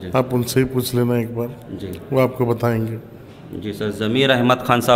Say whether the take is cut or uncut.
uncut